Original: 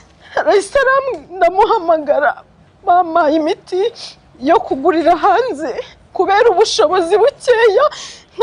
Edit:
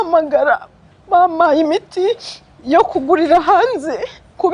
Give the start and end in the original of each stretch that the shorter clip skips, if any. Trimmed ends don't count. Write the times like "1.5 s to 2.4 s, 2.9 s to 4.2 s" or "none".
none